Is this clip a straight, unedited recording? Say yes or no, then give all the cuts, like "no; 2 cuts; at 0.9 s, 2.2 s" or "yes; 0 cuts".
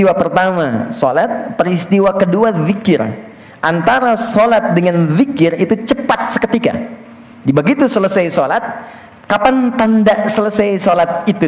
yes; 0 cuts